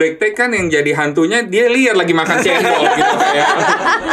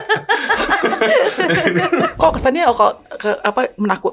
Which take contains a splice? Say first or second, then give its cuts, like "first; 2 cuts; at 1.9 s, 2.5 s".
second; 1 cut; at 2.1 s